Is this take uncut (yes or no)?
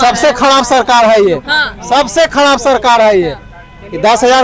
yes